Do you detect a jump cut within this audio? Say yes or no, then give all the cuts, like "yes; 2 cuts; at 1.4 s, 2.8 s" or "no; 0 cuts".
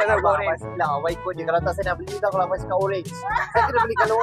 no; 0 cuts